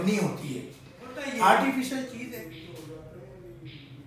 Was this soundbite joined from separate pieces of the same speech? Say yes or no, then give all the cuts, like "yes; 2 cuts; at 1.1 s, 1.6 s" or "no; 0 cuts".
yes; 1 cut; at 2.1 s